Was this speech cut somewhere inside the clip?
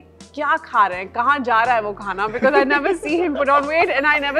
no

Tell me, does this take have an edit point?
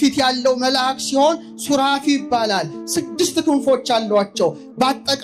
no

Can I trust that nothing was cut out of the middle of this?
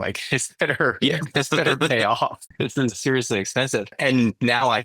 no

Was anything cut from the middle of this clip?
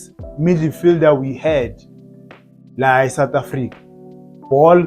no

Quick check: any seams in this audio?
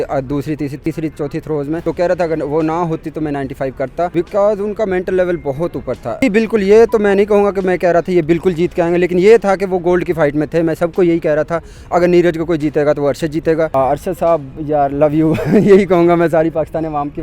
yes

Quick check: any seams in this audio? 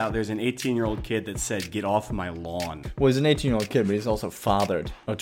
yes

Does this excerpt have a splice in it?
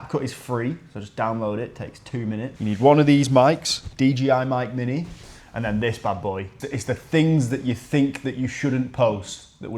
yes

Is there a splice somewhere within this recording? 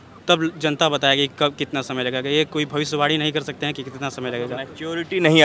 no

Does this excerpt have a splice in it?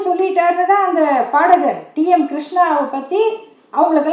no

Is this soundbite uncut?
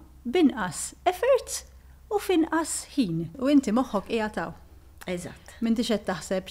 no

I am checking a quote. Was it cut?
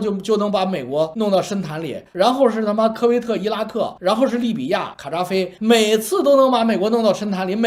no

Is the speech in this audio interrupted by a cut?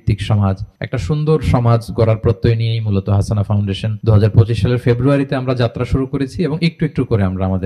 yes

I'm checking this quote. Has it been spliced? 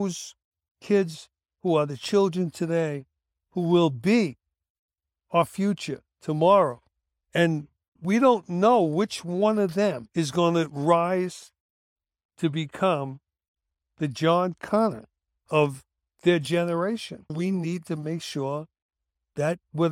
yes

